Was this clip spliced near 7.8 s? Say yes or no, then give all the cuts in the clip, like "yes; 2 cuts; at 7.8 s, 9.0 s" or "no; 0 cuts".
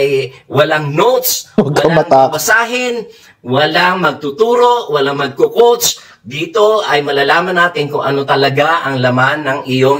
no; 0 cuts